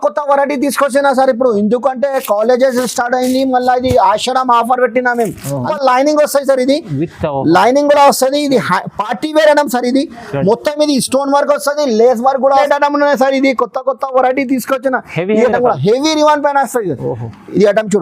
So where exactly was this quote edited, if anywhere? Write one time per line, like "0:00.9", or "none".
0:05.7
0:12.6